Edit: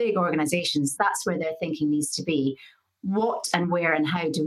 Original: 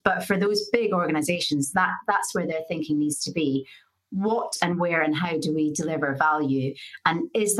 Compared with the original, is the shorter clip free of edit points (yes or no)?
no